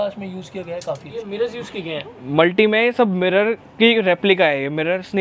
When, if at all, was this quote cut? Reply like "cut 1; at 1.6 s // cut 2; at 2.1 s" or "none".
cut 1; at 1.2 s